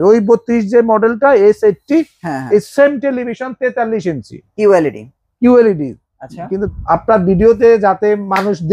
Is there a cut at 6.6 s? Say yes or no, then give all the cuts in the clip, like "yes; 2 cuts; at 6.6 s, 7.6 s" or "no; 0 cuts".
yes; 1 cut; at 6.6 s